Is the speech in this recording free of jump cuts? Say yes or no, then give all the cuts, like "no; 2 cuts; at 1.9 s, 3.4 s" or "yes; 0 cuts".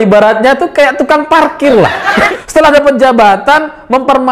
no; 1 cut; at 2.3 s